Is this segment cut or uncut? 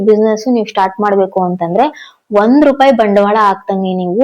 uncut